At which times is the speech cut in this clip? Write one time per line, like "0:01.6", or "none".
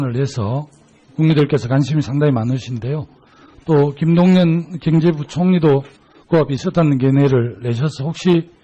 0:04.7